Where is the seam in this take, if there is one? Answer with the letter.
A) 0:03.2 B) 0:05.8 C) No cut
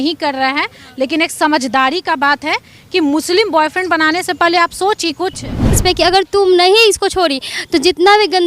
B